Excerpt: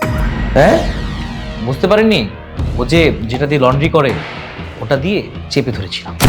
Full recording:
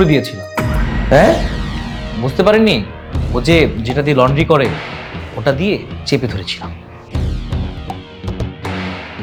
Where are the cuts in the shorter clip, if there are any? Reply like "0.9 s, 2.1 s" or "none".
none

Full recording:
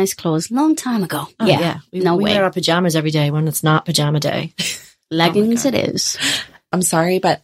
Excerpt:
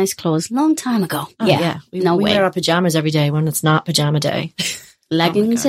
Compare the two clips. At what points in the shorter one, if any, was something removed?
none

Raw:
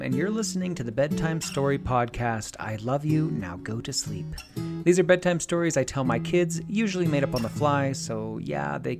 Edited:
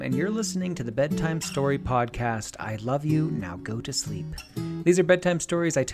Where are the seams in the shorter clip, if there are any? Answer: none

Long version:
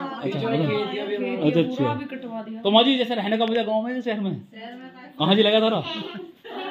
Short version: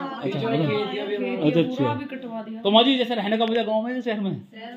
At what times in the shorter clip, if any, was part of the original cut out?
none

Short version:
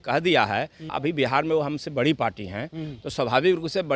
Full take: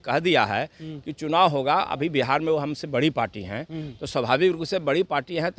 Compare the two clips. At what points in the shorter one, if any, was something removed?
0.9 s

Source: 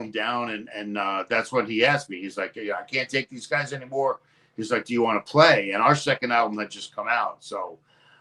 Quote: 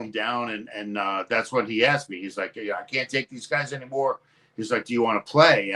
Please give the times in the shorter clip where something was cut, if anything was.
none

